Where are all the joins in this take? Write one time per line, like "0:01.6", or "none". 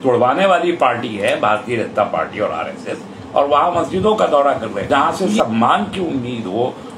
0:04.8